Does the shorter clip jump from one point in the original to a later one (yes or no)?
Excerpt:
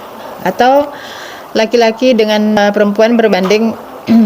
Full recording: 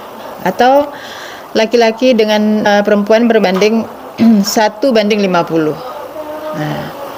yes